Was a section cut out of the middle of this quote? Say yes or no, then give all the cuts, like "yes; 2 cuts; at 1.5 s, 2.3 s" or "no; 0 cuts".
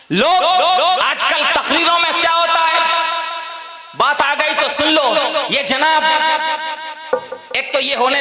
no; 0 cuts